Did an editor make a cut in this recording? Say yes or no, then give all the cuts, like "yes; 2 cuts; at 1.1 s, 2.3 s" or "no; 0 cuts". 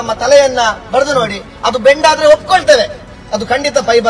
no; 0 cuts